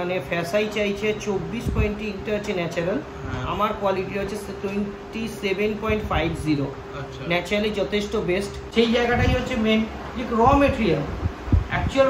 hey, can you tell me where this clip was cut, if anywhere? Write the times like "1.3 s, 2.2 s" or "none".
8.6 s